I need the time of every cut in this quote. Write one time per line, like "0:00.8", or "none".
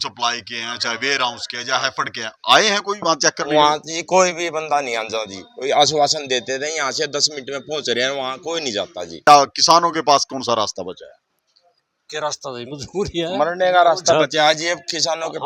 0:09.3